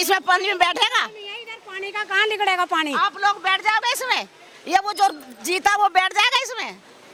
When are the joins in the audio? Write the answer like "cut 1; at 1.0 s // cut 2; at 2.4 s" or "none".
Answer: none